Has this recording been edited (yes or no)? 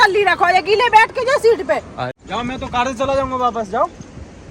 yes